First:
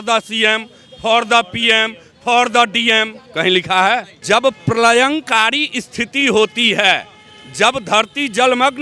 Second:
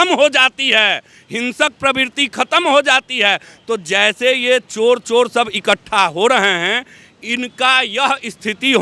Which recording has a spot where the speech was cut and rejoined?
first; 1 cut; at 4.1 s

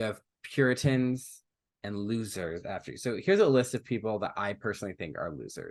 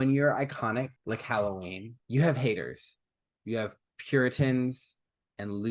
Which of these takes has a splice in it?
second; 2 cuts; at 1.0 s, 1.9 s

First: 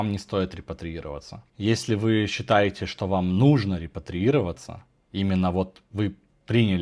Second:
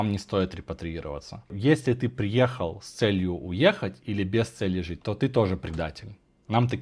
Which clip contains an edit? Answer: second; 1 cut; at 1.5 s

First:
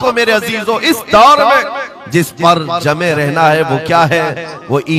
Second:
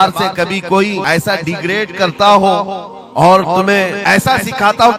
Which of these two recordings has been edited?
second; 2 cuts; at 1.0 s, 4.0 s

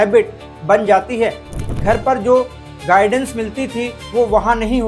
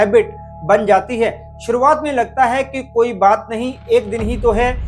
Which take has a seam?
first; 1 cut; at 1.6 s

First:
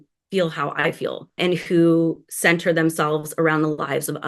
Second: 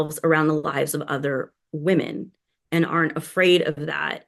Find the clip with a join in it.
first; 1 cut; at 1.4 s

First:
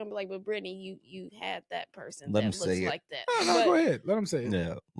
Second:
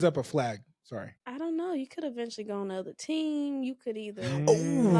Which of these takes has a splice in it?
second; 1 cut; at 1.2 s

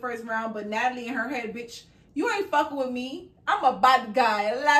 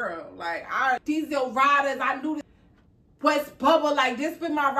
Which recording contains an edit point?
second; 2 cuts; at 1.0 s, 2.5 s

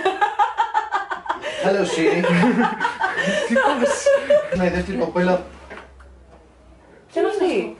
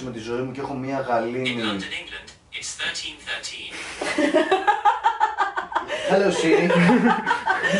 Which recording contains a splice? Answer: first; 1 cut; at 4.6 s

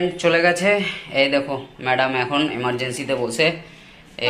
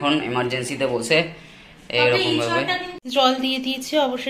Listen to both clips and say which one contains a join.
second; 1 cut; at 2.9 s

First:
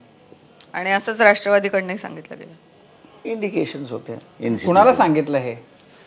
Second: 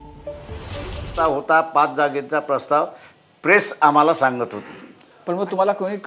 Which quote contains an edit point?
second; 1 cut; at 1.1 s

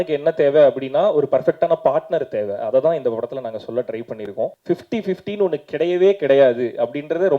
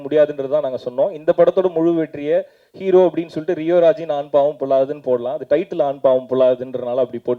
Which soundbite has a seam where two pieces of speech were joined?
first; 1 cut; at 4.6 s

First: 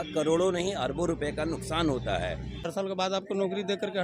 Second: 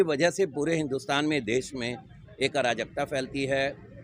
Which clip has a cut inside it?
first; 1 cut; at 2.7 s

